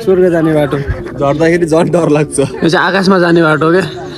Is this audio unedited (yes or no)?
yes